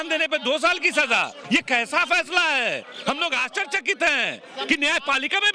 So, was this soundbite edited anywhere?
yes; 1 cut; at 1.4 s

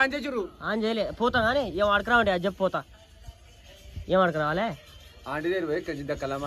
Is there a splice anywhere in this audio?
no; 0 cuts

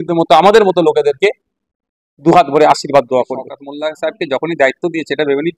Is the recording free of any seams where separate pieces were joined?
no; 1 cut; at 3.6 s

